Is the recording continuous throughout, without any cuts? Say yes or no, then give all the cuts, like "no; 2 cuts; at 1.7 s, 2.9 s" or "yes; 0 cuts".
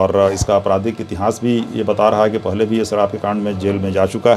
yes; 0 cuts